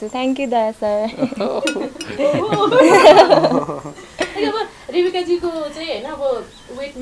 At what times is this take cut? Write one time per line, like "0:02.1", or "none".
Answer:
none